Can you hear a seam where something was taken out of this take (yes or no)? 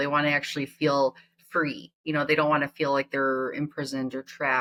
no